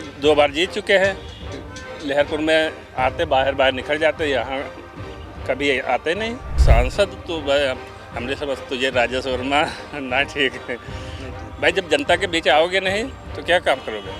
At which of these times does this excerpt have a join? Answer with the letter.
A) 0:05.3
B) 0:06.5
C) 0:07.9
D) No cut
B